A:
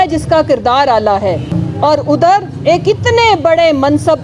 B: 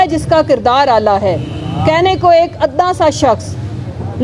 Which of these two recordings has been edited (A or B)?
A